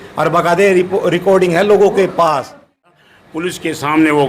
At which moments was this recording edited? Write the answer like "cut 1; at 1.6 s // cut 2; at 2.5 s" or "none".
cut 1; at 3.1 s